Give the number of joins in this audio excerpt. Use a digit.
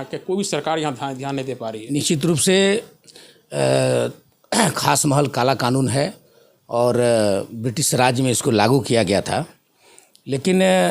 1